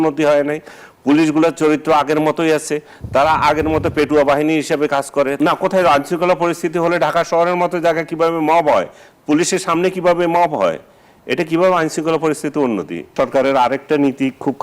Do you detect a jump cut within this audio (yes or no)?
yes